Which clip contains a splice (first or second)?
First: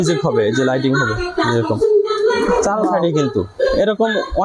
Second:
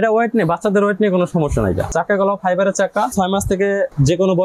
second